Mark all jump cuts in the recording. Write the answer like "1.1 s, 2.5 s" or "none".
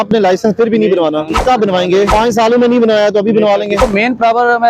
1.3 s, 2.1 s, 3.8 s